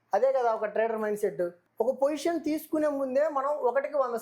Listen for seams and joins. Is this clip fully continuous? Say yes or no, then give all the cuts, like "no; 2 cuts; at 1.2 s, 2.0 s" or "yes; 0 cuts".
no; 1 cut; at 1.6 s